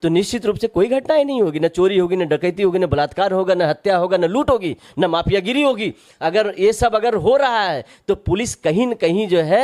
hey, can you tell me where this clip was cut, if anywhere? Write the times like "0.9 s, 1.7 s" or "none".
none